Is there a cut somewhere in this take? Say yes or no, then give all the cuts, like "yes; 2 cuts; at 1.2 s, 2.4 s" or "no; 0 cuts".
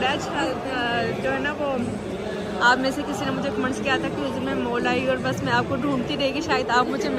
no; 0 cuts